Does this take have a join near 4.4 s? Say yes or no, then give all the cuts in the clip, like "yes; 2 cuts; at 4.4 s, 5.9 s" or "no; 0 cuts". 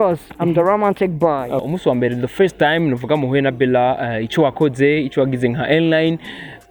no; 1 cut; at 1.6 s